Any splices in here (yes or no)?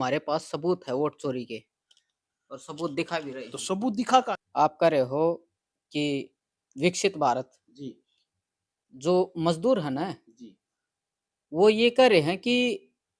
yes